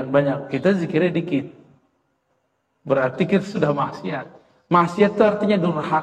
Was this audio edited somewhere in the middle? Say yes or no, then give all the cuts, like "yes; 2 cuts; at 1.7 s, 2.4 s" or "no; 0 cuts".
no; 0 cuts